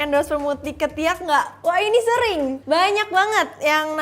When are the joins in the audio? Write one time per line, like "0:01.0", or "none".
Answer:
none

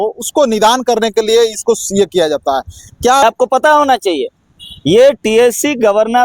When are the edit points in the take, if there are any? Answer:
0:03.2

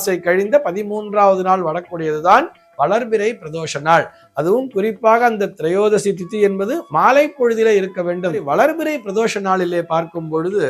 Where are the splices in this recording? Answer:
0:08.5

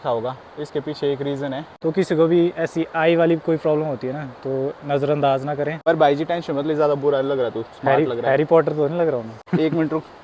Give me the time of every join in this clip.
0:01.7
0:05.8
0:09.4

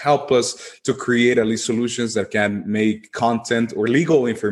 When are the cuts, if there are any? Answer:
none

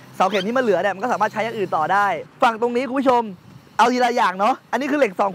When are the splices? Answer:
0:02.3

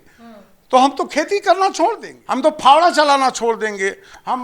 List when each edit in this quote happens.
0:02.1

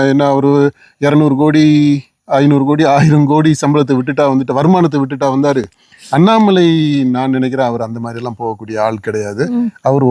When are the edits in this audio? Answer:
0:05.8

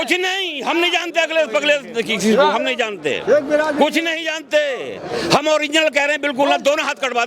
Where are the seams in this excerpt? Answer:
none

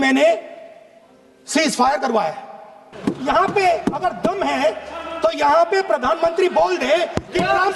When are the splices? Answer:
0:02.9

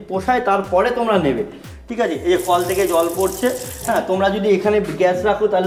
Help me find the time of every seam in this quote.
none

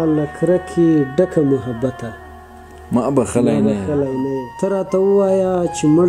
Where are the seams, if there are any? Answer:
0:04.4

